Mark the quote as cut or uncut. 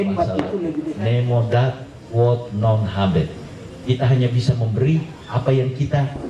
cut